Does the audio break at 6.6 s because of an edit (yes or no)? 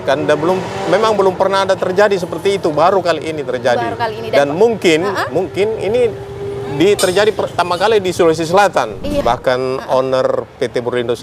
no